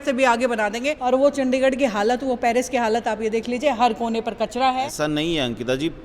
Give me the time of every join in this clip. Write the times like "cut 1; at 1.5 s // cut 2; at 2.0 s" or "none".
cut 1; at 1.2 s // cut 2; at 4.5 s